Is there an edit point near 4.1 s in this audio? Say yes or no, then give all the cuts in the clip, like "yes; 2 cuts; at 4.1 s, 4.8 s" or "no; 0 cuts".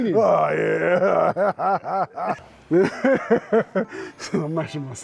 no; 1 cut; at 2.5 s